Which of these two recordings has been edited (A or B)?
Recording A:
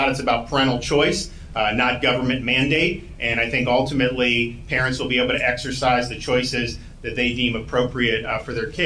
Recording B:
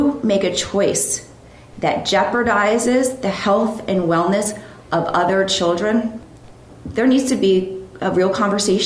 B